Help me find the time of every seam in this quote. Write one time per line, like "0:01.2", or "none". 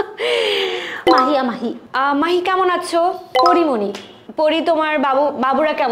0:01.1